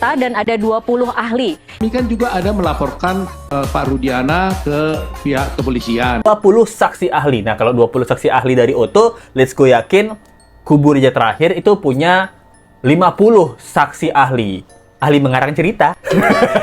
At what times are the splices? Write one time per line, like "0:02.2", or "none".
0:06.3